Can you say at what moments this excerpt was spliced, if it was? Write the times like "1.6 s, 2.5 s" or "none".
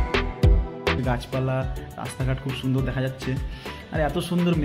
1.0 s